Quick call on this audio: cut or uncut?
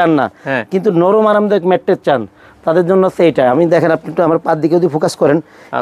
uncut